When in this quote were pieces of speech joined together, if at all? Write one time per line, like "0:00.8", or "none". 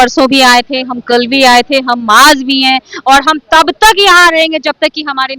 none